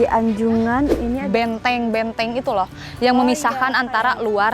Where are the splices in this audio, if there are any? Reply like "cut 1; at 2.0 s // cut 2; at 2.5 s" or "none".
cut 1; at 1.1 s